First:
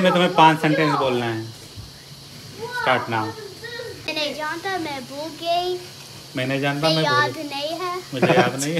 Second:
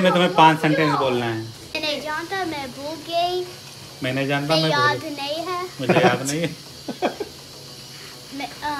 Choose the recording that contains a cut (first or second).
second